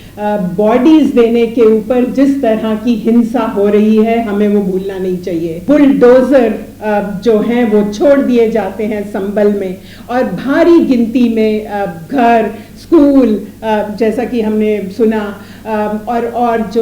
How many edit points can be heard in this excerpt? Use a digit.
1